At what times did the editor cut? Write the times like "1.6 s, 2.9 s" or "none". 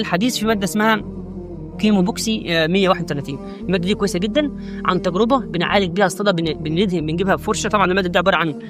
none

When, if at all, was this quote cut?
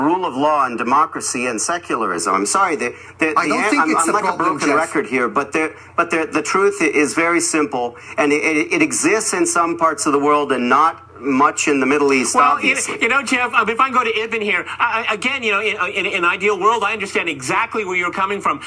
none

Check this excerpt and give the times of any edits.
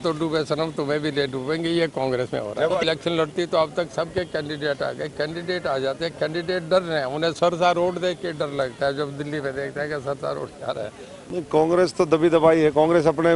2.8 s, 11.1 s

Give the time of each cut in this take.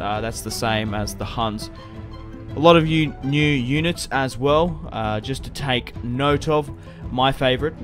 4.8 s

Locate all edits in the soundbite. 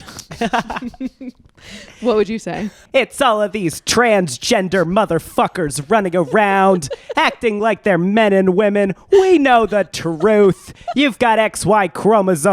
2.8 s

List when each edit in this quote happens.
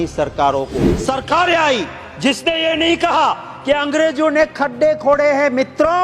0.9 s

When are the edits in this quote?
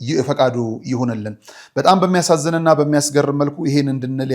none

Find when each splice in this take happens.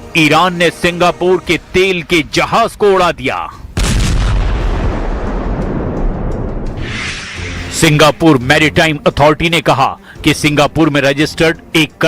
10.9 s

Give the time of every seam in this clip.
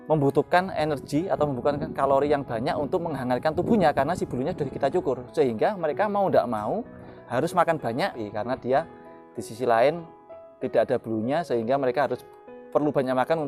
8.2 s

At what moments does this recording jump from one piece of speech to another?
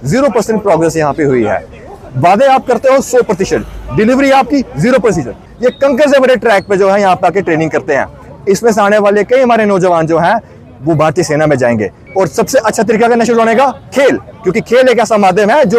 5.5 s, 12.0 s

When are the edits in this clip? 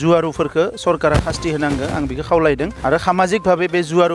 2.7 s

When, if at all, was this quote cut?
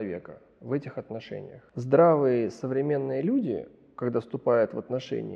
1.6 s

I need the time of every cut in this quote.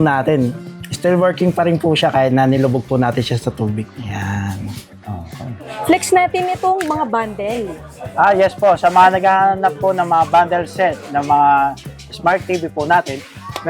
4.0 s, 5.7 s

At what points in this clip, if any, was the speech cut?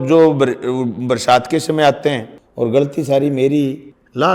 2.4 s

